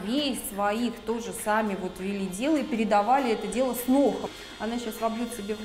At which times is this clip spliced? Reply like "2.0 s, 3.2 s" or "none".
4.3 s